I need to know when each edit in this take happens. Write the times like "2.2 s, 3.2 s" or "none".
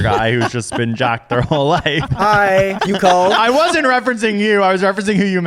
2.1 s, 2.8 s